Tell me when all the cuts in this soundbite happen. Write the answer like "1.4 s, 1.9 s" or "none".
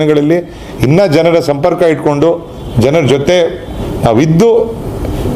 none